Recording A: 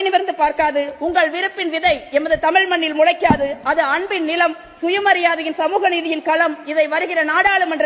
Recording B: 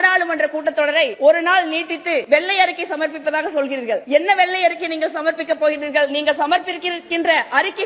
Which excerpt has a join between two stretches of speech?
B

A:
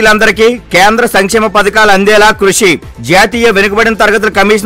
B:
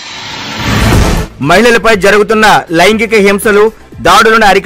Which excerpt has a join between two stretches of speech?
B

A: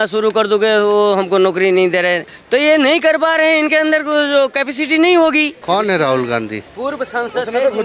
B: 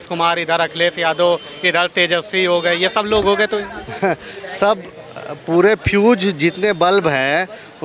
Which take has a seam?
A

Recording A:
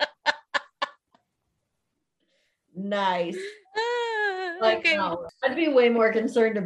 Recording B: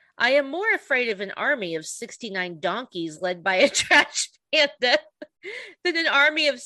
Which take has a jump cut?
A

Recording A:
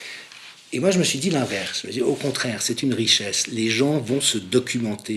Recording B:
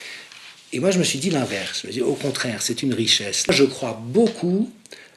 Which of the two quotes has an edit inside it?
B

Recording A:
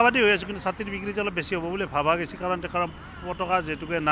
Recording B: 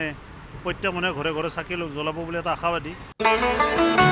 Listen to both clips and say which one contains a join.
B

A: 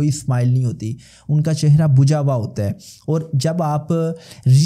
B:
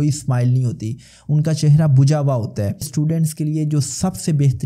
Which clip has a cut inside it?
B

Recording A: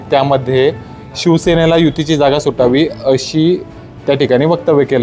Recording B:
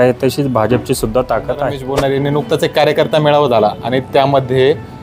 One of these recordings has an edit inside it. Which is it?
B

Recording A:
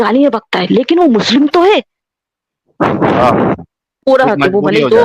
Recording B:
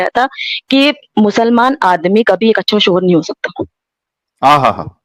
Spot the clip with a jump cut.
A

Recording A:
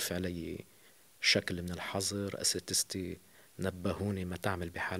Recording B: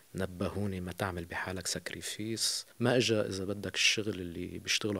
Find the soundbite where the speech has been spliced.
B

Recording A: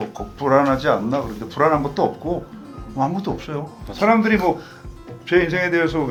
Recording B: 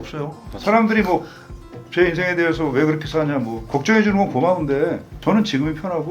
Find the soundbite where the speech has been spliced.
B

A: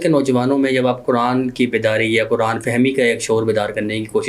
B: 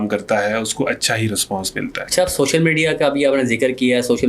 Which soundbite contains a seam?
B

